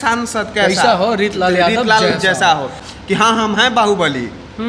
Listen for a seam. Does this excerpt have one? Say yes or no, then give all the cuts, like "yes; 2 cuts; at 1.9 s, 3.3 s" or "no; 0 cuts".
yes; 1 cut; at 2.9 s